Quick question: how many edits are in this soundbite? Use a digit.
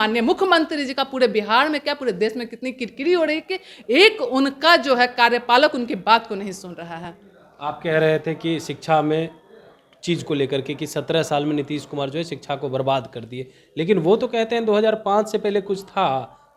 0